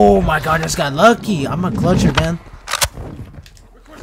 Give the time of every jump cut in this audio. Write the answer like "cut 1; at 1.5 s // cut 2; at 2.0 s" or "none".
none

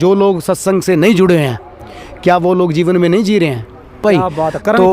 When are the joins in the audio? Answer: cut 1; at 4.0 s

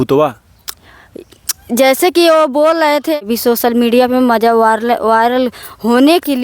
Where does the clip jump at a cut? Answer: cut 1; at 3.2 s

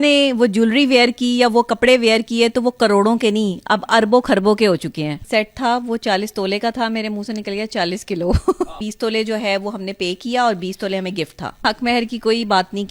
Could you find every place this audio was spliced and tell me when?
cut 1; at 5.2 s // cut 2; at 8.8 s // cut 3; at 11.6 s

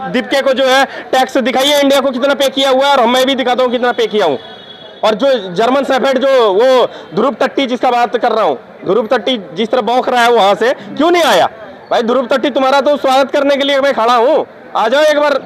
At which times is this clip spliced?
none

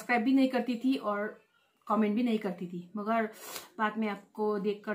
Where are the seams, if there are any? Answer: none

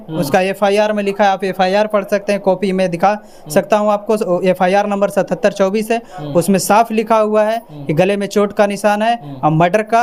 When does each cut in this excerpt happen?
none

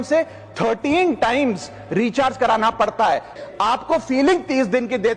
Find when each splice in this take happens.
cut 1; at 3.3 s

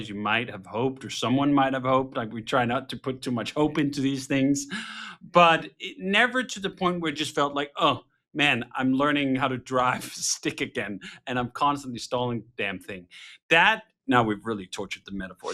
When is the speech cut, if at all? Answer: none

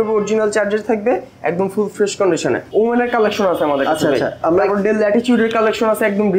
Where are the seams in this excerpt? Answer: cut 1; at 2.7 s

